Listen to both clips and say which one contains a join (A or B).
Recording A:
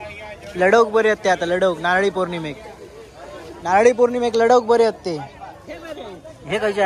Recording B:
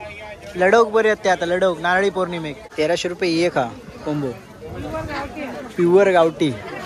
B